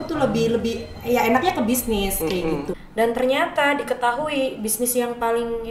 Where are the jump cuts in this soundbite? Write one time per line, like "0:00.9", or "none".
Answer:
0:02.7

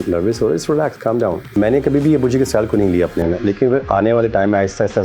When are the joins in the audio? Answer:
0:01.5

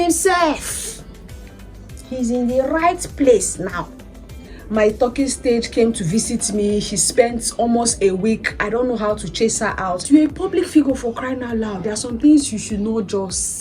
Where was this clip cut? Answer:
0:04.6
0:10.0

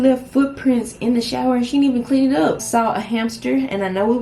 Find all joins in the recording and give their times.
0:02.6

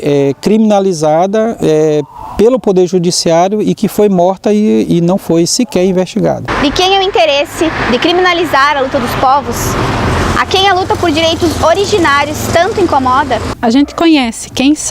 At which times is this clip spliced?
none

